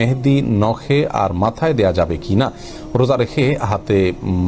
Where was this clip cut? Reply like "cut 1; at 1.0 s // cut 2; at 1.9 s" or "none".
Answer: none